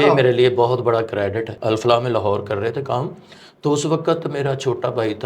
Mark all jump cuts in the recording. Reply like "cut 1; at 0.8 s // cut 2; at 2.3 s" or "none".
cut 1; at 1.5 s